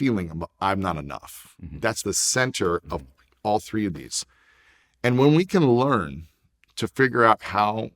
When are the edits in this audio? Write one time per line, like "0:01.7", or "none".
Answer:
0:02.0